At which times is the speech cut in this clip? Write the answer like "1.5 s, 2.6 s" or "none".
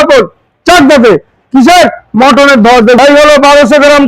3.0 s